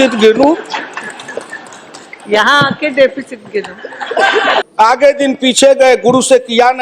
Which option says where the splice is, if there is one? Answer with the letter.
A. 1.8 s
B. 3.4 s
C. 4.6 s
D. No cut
C